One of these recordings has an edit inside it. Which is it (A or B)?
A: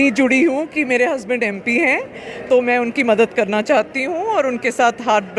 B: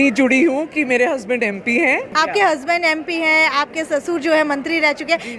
B